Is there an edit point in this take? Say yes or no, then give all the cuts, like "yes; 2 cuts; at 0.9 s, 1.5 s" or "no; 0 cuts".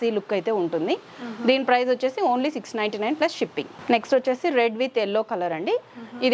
no; 0 cuts